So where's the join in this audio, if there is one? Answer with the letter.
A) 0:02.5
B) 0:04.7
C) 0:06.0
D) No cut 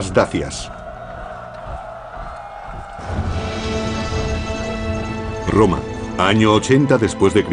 D